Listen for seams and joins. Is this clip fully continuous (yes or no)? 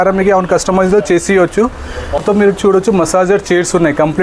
no